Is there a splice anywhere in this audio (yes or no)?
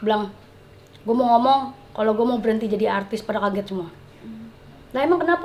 no